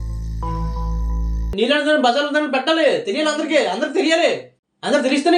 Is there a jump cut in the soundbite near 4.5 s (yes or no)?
no